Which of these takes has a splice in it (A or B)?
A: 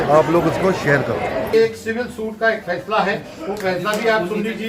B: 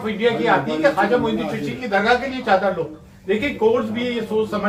A